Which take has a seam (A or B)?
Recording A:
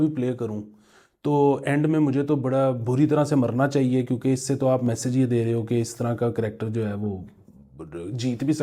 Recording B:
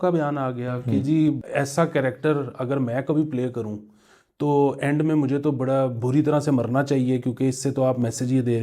B